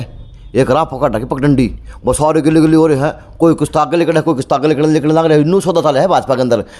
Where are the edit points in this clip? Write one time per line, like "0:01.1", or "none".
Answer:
none